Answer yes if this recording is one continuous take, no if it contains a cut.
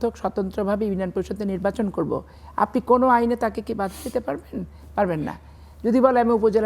yes